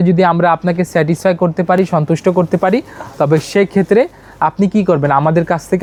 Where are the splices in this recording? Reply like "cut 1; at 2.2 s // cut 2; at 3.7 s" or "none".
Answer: none

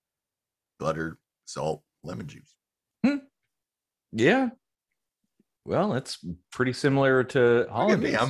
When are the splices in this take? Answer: none

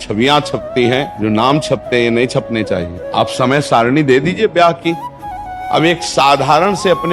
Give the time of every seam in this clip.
cut 1; at 1.1 s // cut 2; at 3.0 s // cut 3; at 5.5 s

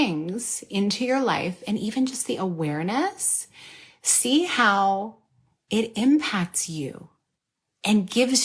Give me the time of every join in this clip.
none

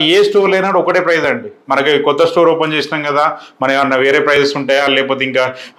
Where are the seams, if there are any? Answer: none

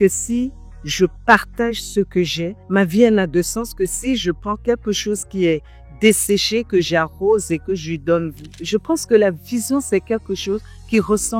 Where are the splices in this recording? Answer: cut 1; at 2.5 s // cut 2; at 8.6 s

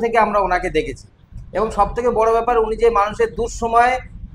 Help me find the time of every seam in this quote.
none

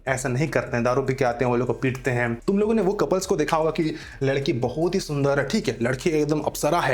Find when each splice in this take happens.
cut 1; at 2.4 s

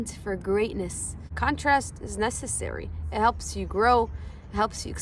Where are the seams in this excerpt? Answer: cut 1; at 1.3 s

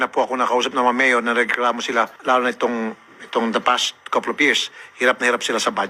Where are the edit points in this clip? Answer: none

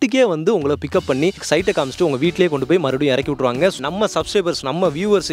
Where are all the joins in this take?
cut 1; at 1.4 s // cut 2; at 3.8 s

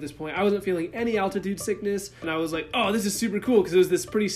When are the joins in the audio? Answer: cut 1; at 2.2 s

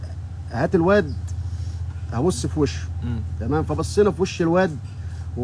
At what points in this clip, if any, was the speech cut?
none

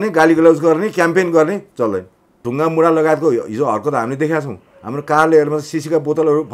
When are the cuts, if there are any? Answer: cut 1; at 2.5 s

